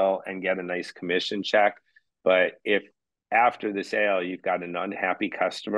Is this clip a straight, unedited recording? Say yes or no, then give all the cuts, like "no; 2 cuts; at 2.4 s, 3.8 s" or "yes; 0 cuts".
yes; 0 cuts